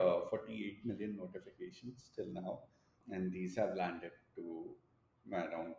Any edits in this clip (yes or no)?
no